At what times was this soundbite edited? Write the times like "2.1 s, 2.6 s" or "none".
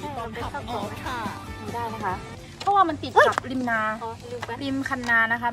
none